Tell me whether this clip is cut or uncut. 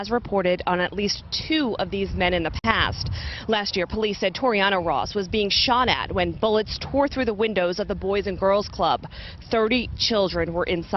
uncut